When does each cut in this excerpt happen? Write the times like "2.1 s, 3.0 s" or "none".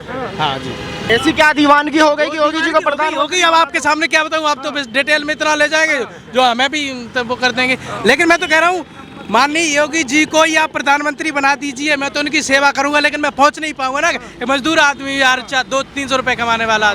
1.1 s